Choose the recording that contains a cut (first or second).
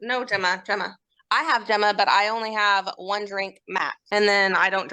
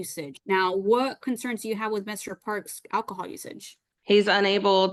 first